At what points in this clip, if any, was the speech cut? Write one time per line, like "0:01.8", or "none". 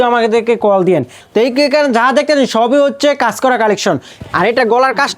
0:01.2
0:04.1